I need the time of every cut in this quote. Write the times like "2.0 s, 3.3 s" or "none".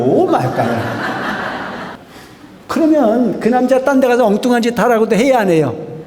2.0 s